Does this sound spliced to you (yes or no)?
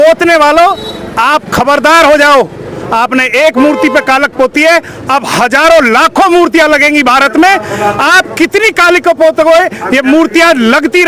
no